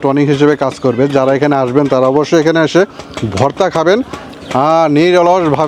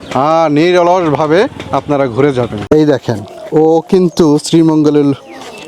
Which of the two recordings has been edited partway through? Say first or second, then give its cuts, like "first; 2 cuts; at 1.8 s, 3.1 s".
second; 1 cut; at 2.6 s